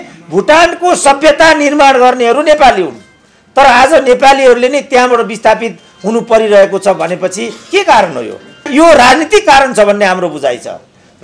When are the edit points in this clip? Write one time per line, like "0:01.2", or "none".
0:08.7